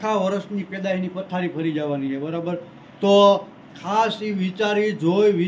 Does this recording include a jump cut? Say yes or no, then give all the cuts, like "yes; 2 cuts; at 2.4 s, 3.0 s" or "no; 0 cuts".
no; 0 cuts